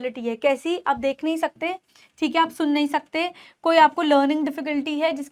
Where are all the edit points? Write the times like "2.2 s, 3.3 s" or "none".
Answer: none